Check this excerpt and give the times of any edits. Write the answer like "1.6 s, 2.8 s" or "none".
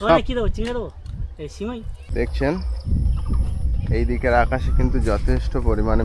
2.0 s